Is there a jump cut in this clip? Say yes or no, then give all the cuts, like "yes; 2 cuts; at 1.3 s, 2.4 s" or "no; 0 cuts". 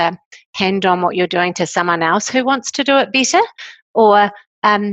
no; 0 cuts